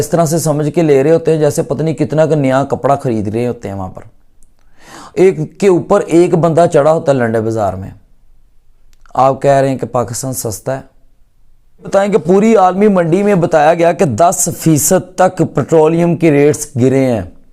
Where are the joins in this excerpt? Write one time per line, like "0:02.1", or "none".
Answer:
0:11.9